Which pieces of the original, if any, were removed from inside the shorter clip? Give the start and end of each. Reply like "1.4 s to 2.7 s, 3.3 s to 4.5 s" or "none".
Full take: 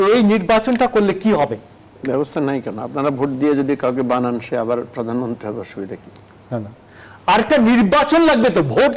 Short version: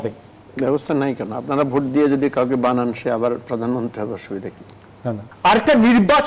6.7 s to 7.1 s